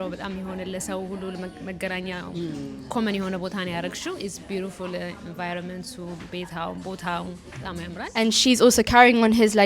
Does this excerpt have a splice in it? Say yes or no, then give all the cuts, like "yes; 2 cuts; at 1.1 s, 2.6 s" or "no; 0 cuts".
yes; 1 cut; at 8.0 s